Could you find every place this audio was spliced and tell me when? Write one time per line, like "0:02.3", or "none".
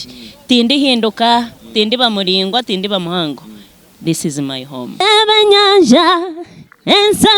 0:05.0